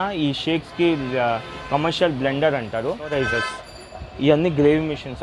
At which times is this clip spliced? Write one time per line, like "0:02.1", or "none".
0:03.1